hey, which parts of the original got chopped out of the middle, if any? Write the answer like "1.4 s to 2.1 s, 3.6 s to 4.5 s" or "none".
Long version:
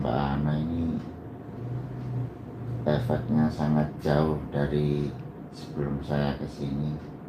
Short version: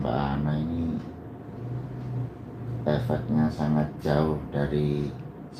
none